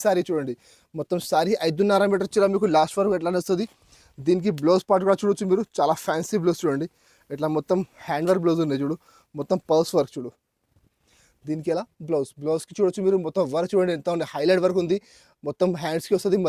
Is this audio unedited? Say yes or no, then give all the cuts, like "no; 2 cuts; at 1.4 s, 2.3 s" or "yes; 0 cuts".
yes; 0 cuts